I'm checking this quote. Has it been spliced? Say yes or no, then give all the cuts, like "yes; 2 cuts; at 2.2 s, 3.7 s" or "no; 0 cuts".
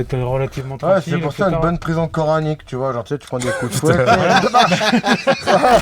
yes; 1 cut; at 3.8 s